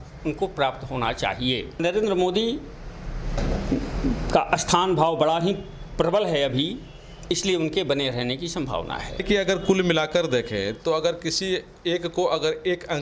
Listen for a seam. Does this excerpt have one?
yes; 2 cuts; at 1.8 s, 9.2 s

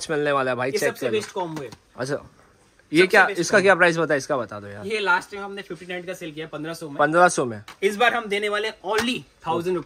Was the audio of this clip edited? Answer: no; 0 cuts

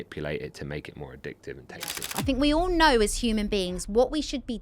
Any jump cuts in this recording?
yes; 1 cut; at 1.6 s

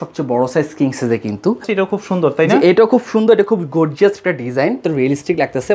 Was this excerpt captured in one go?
no; 2 cuts; at 1.7 s, 4.8 s

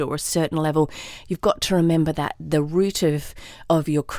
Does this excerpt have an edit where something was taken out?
no; 0 cuts

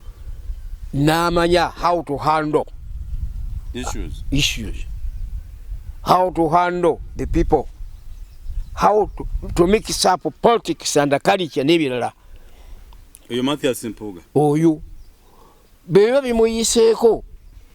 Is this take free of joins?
yes; 0 cuts

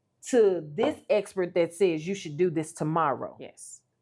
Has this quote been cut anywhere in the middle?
no; 0 cuts

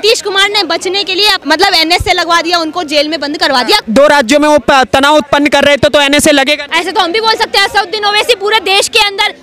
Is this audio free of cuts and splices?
no; 3 cuts; at 1.4 s, 3.9 s, 6.7 s

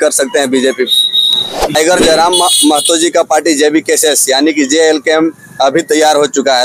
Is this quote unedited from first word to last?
no; 1 cut; at 1.8 s

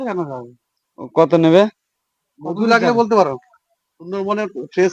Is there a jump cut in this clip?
no; 0 cuts

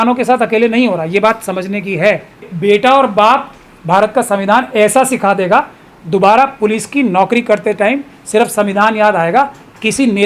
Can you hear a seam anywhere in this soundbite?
yes; 1 cut; at 2.5 s

